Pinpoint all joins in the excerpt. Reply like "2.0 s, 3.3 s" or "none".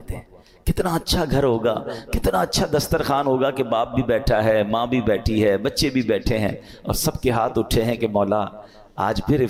none